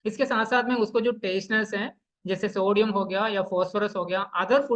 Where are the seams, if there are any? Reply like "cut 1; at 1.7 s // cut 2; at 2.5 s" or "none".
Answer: none